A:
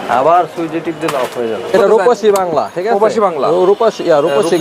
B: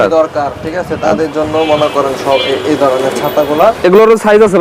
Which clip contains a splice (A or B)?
A